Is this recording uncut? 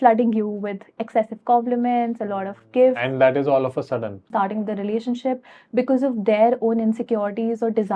no; 1 cut; at 4.3 s

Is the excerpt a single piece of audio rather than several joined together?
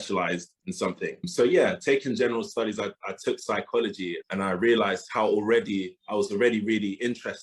no; 2 cuts; at 4.2 s, 5.1 s

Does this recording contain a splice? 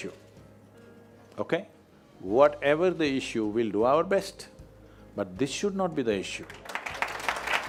no; 0 cuts

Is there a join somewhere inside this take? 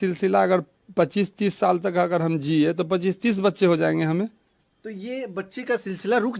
no; 0 cuts

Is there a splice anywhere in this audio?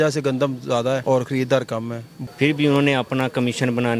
yes; 1 cut; at 2.1 s

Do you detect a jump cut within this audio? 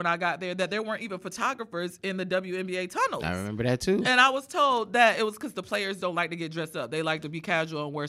yes; 1 cut; at 3.2 s

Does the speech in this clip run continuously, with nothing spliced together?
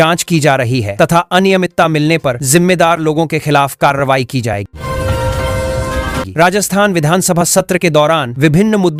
yes; 0 cuts

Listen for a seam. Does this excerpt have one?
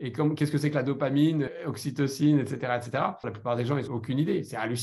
yes; 2 cuts; at 1.5 s, 3.6 s

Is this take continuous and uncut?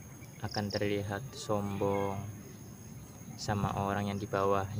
yes; 0 cuts

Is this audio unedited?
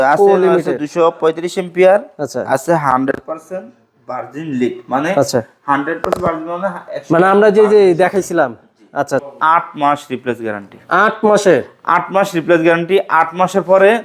no; 1 cut; at 9.3 s

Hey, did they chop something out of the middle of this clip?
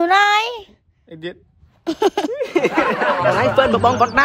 yes; 1 cut; at 3.1 s

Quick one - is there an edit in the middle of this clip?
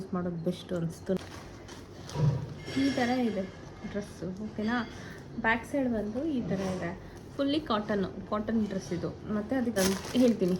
yes; 2 cuts; at 1.2 s, 9.8 s

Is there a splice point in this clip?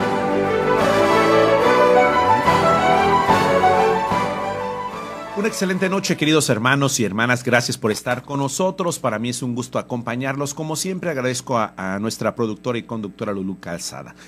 yes; 1 cut; at 4.0 s

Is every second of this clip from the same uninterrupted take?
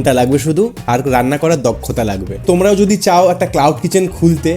no; 1 cut; at 2.4 s

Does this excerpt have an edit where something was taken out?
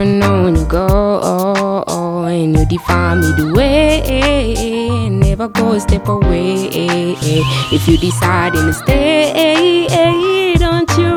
no; 0 cuts

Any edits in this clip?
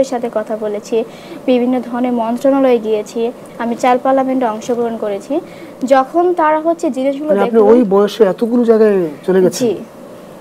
no; 0 cuts

